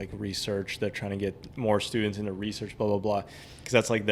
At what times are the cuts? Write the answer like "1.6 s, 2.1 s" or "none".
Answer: none